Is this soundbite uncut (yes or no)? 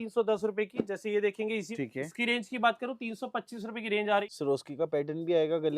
no